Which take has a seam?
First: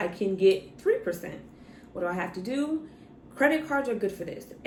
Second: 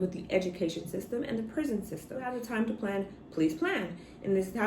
second; 1 cut; at 2.3 s

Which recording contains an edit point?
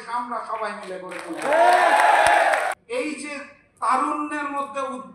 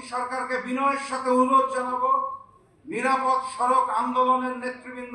first; 1 cut; at 2.7 s

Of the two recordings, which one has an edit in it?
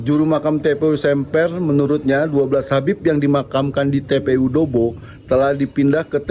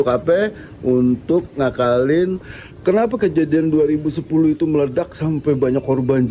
second; 1 cut; at 2.5 s

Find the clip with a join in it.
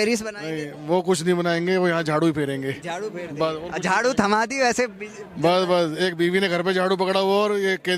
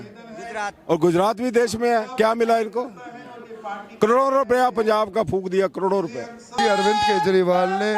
second; 1 cut; at 6.6 s

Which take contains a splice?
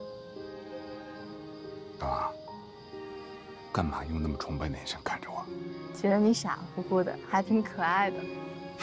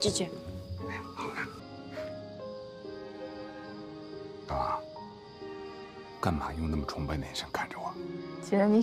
second; 1 cut; at 1.6 s

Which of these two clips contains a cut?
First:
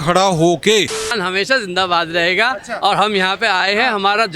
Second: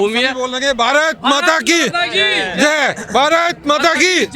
first; 1 cut; at 1.1 s

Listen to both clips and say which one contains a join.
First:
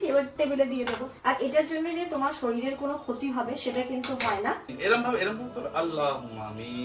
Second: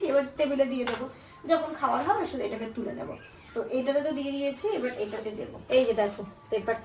first; 2 cuts; at 1.1 s, 4.7 s

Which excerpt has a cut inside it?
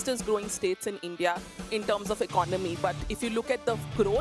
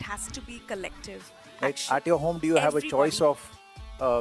second; 1 cut; at 1.4 s

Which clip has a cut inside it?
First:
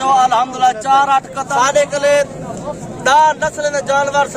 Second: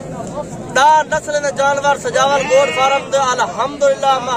first; 1 cut; at 1.4 s

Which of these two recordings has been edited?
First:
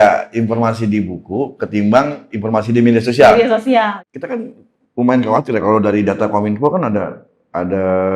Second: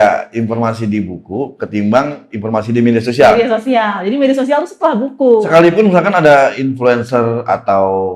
first; 1 cut; at 4.0 s

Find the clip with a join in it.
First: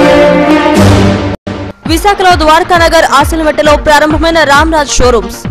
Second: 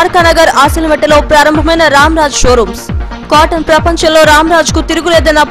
first; 1 cut; at 1.3 s

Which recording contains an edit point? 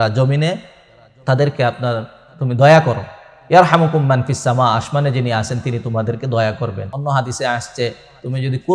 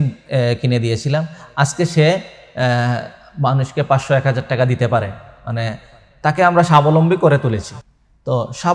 first; 1 cut; at 6.9 s

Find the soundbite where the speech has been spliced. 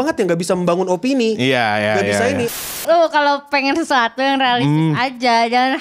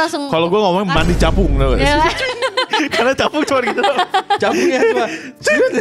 first; 1 cut; at 2.6 s

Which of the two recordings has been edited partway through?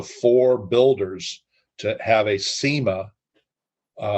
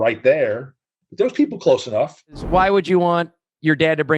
second; 1 cut; at 2.4 s

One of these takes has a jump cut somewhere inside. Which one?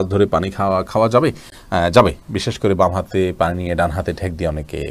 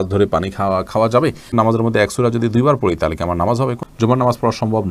second; 2 cuts; at 1.5 s, 3.8 s

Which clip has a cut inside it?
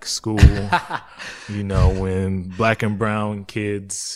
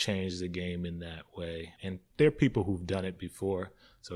second; 1 cut; at 1.7 s

